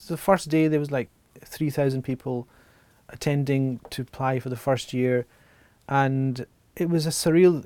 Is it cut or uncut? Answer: cut